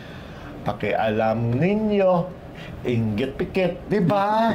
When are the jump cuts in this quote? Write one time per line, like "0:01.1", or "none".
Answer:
none